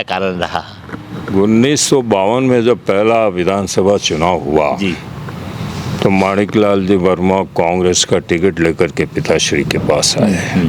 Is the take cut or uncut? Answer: uncut